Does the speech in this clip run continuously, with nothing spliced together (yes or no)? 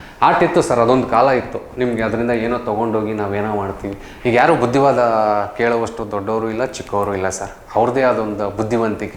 yes